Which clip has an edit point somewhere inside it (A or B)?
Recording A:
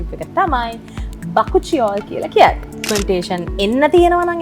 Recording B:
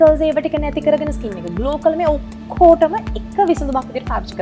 A